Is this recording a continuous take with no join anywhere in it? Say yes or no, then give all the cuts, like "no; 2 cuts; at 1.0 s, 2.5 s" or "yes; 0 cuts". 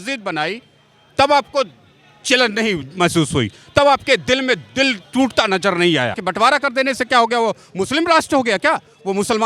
no; 1 cut; at 6.2 s